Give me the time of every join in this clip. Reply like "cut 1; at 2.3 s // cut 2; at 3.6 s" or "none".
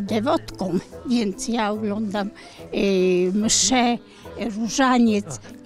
none